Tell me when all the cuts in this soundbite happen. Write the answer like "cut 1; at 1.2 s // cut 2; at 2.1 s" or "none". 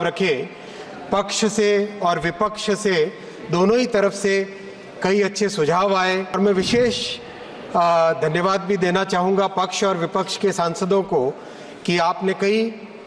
cut 1; at 6.4 s